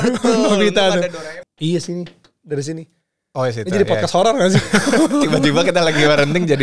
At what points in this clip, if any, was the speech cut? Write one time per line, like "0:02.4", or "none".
0:01.1